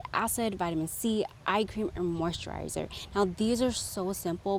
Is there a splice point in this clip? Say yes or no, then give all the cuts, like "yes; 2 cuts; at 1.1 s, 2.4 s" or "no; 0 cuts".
no; 0 cuts